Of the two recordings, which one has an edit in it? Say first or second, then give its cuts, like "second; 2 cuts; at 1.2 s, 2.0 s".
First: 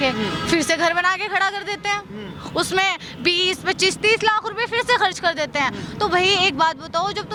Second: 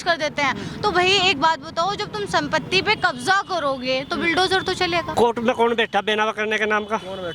second; 1 cut; at 5.1 s